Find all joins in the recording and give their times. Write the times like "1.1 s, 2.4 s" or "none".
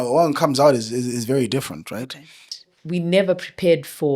2.5 s

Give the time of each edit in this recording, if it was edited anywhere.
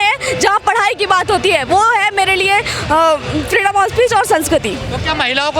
none

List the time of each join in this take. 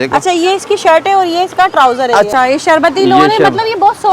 2.3 s

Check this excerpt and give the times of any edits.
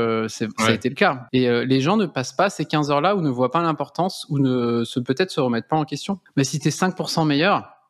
1.2 s, 6.2 s

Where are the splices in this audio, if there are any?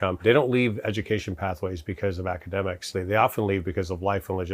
none

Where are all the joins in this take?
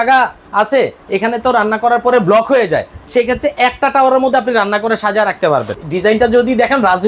5.7 s

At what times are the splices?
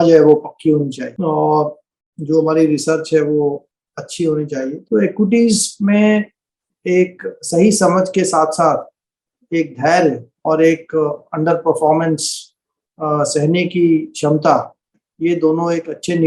1.1 s, 4.8 s

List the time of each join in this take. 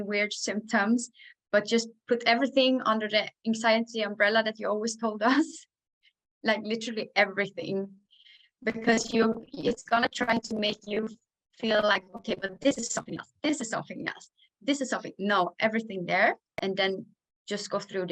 none

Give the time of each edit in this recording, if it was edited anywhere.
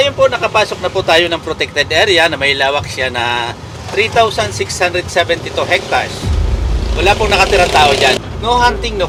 none

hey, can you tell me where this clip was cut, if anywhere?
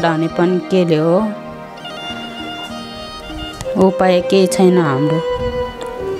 1.4 s, 3.3 s, 5.1 s

